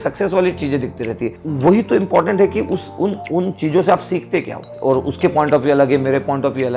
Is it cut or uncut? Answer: cut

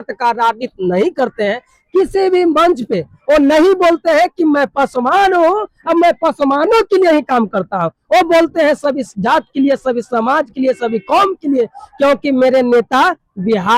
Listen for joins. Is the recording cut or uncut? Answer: uncut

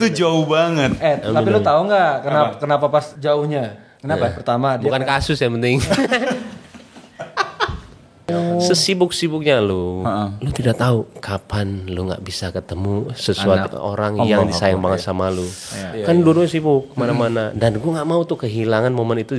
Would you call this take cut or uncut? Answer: cut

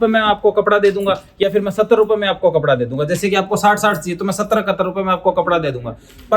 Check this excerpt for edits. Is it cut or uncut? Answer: uncut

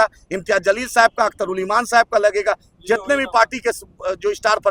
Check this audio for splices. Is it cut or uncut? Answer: uncut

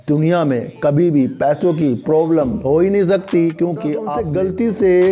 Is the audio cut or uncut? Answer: cut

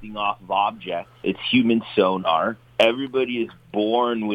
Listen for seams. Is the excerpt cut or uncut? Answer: cut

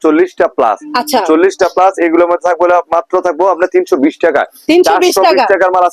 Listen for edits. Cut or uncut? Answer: uncut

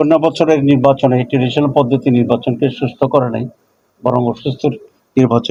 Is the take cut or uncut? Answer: uncut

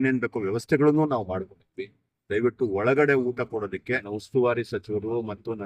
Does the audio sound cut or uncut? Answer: cut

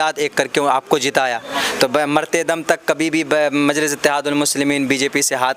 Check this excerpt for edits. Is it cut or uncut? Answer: cut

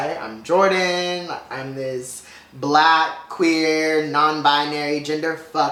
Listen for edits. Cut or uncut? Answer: uncut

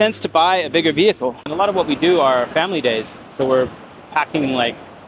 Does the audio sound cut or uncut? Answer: cut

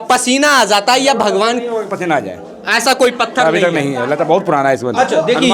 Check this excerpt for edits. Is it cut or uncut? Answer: uncut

